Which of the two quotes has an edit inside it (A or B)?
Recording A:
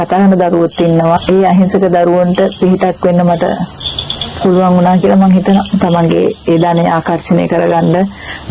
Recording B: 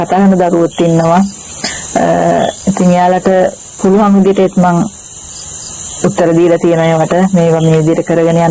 A